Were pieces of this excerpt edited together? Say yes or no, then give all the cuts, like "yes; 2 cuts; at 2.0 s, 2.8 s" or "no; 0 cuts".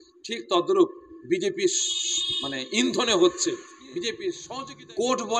yes; 1 cut; at 4.4 s